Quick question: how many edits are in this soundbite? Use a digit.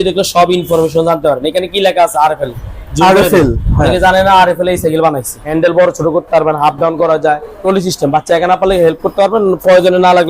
2